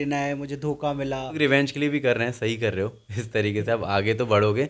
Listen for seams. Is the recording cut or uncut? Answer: cut